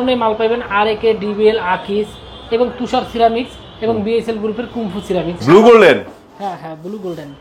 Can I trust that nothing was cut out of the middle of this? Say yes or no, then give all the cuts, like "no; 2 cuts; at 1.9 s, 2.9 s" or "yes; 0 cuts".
no; 1 cut; at 5.4 s